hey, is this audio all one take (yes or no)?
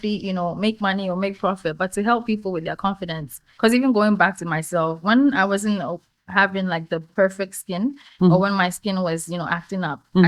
yes